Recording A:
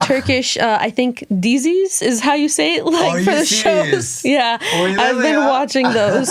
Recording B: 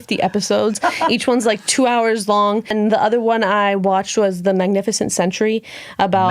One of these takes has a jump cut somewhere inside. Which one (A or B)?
B